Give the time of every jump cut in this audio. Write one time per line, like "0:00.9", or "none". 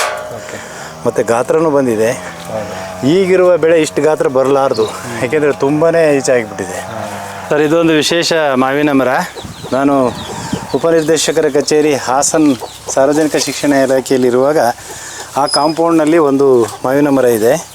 0:07.3